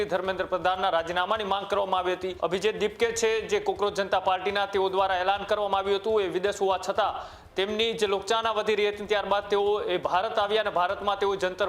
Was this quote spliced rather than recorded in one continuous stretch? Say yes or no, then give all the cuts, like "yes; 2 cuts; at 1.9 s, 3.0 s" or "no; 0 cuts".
yes; 1 cut; at 2.3 s